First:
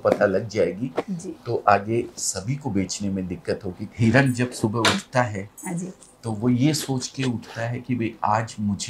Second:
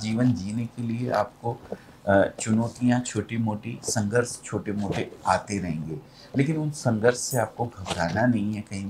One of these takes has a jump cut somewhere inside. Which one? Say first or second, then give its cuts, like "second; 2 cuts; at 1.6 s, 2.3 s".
first; 1 cut; at 3.9 s